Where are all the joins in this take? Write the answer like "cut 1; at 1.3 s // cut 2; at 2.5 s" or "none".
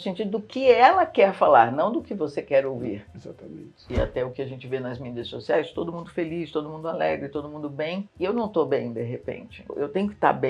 cut 1; at 3.8 s